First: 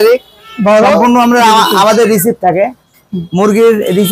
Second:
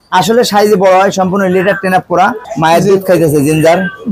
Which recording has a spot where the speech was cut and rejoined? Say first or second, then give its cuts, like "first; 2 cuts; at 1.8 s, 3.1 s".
second; 1 cut; at 2.4 s